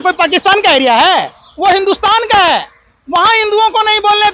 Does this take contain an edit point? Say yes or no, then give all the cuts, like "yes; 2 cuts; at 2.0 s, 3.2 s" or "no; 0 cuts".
no; 0 cuts